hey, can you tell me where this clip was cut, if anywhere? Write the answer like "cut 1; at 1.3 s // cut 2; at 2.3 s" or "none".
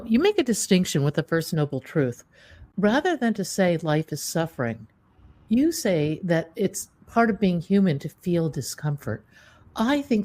cut 1; at 2.7 s